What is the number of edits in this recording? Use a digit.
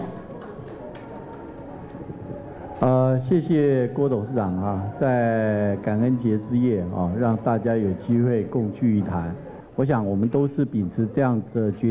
1